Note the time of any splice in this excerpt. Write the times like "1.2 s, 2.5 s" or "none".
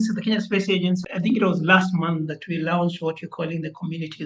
1.1 s